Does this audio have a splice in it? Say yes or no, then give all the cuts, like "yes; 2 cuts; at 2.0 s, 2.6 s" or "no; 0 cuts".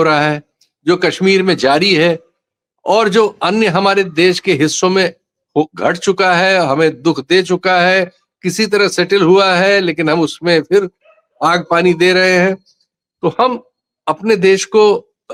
no; 0 cuts